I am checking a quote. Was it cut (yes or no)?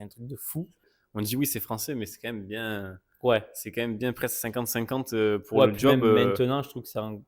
yes